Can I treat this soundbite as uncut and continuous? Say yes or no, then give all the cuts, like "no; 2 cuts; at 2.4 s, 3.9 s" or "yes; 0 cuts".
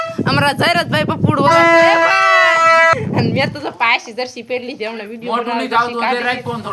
no; 1 cut; at 3.0 s